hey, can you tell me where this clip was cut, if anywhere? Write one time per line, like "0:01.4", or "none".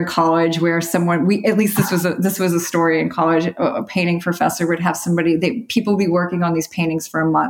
none